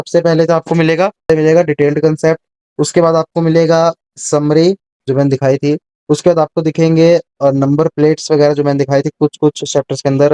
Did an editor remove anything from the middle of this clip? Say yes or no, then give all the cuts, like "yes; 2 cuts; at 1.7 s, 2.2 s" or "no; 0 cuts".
yes; 1 cut; at 1.2 s